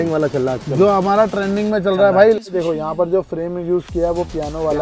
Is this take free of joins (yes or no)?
no